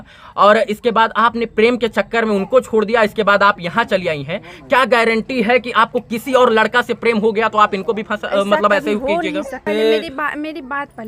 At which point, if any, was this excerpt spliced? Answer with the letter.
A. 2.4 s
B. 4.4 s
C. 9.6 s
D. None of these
C